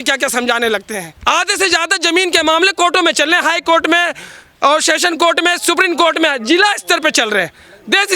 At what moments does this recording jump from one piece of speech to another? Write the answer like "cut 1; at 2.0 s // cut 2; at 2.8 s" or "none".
cut 1; at 1.1 s